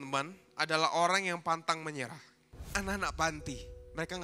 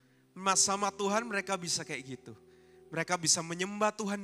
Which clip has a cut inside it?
first; 1 cut; at 2.7 s

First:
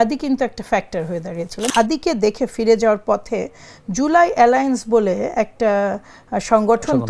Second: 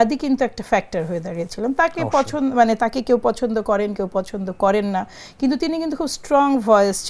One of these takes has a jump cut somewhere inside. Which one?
first; 1 cut; at 1.7 s

